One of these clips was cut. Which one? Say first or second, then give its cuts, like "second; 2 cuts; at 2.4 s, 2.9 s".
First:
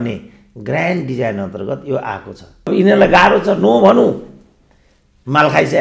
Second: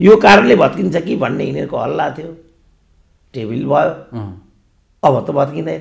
first; 1 cut; at 2.7 s